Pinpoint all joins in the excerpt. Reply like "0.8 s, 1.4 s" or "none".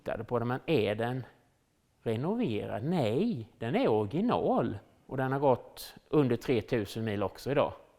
5.0 s